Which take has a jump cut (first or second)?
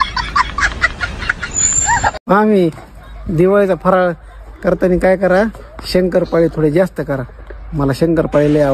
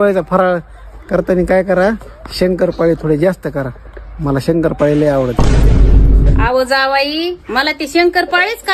first